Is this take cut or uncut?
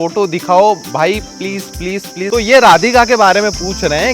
cut